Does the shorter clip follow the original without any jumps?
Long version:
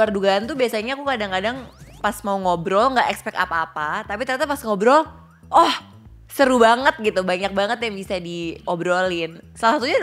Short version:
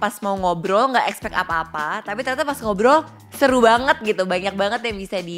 no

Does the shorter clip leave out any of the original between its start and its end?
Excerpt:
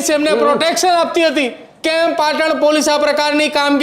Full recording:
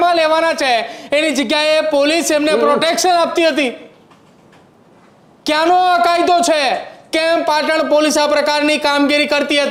yes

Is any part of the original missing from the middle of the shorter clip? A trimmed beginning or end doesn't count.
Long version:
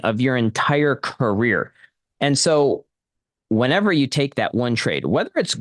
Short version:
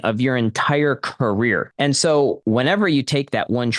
yes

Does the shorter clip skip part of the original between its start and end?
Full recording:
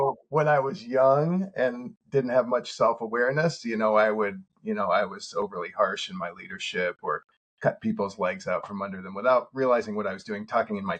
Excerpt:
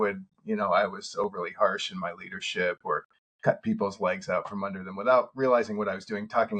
no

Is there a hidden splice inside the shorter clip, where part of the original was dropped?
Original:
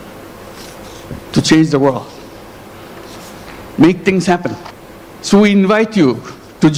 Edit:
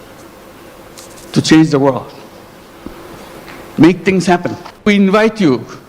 yes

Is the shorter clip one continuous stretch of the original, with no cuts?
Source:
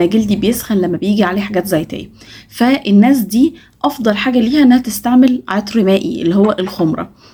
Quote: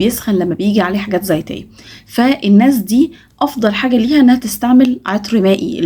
yes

